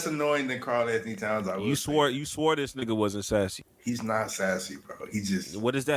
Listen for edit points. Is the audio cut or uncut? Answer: cut